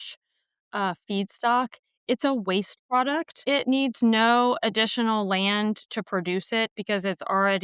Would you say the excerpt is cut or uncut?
uncut